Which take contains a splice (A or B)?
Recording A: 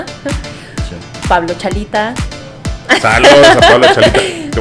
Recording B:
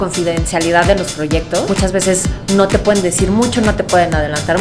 B